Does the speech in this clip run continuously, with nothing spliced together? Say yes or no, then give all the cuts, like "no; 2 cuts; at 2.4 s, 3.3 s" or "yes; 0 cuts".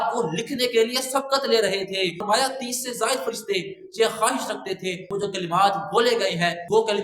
no; 2 cuts; at 2.2 s, 5.1 s